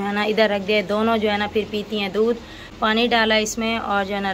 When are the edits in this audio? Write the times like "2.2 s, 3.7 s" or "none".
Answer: none